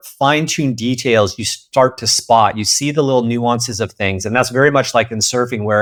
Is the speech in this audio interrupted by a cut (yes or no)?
no